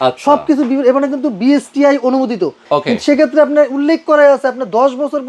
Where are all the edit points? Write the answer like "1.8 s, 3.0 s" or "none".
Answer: 2.6 s